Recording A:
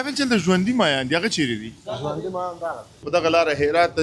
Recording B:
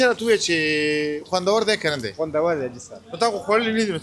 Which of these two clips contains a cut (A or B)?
A